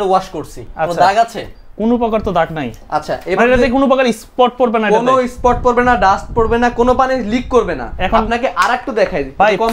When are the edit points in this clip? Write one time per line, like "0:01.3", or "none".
none